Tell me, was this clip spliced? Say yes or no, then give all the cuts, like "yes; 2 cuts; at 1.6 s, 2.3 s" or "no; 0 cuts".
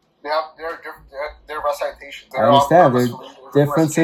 no; 0 cuts